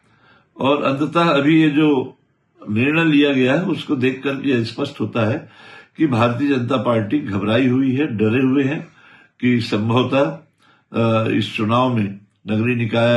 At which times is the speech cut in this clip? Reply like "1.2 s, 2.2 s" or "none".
none